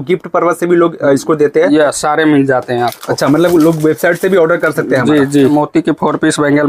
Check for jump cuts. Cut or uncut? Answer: cut